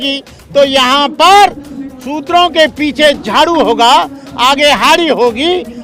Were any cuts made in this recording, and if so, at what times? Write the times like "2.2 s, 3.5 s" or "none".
none